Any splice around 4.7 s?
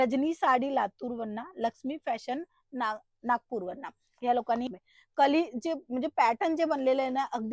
yes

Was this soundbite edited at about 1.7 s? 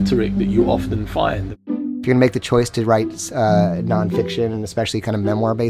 yes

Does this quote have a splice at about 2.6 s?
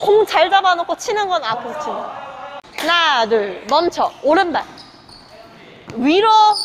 yes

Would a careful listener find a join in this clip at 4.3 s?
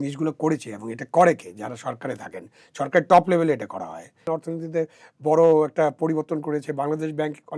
yes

